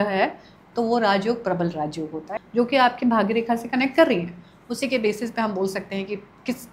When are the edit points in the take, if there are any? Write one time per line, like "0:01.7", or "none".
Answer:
0:02.3

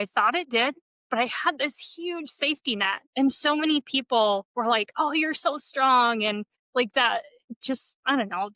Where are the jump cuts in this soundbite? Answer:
0:00.9
0:03.0
0:06.5

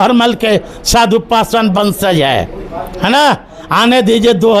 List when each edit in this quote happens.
none

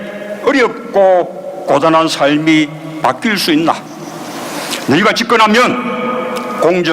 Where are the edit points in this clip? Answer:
0:05.8

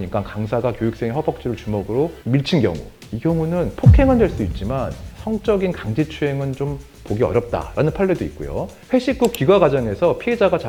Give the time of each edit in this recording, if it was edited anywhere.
none

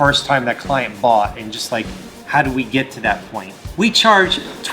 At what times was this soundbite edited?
0:03.6

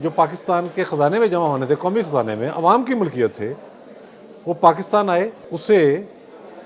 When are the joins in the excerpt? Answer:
0:05.5

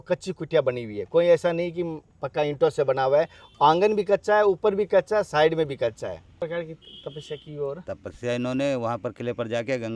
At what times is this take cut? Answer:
0:06.3

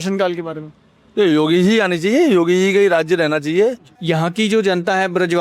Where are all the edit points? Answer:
0:03.9

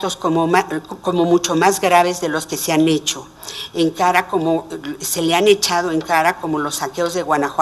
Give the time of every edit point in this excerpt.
0:05.4

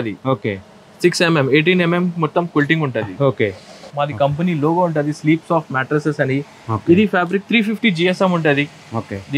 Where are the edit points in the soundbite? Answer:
0:03.8

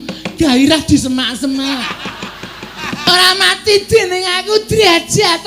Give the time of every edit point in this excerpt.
0:02.8

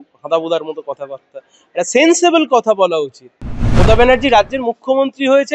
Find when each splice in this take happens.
0:03.8

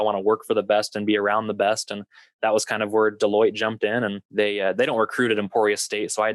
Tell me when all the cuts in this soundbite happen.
0:04.2

